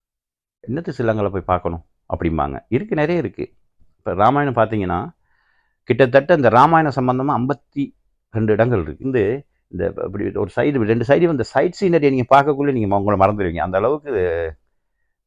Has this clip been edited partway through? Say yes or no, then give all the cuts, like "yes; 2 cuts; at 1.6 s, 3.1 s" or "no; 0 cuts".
yes; 1 cut; at 9.0 s